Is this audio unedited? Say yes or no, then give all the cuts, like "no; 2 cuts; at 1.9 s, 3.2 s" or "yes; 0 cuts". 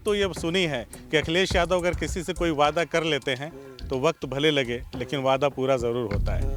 yes; 0 cuts